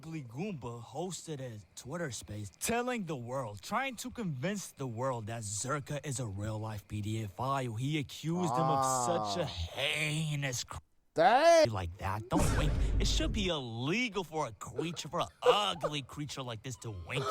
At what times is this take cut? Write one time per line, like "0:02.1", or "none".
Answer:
0:11.7